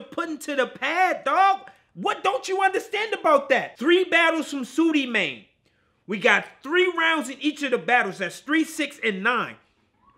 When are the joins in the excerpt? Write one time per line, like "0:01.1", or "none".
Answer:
0:03.7